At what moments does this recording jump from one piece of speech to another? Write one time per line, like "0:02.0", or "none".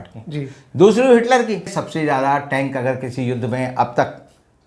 0:01.7

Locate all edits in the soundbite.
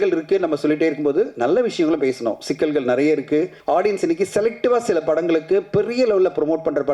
0:03.6

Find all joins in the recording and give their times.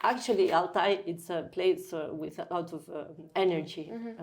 0:03.3

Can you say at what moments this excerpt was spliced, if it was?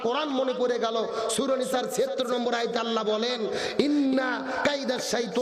none

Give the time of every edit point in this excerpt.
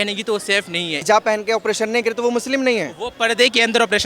0:01.0

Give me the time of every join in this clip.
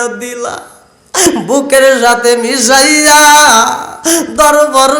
0:01.3

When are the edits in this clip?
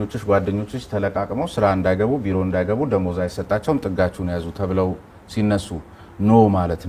none

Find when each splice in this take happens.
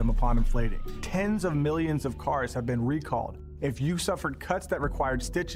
none

